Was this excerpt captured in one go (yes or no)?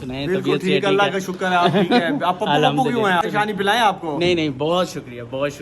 no